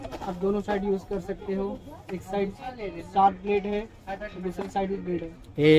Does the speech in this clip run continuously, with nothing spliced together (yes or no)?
yes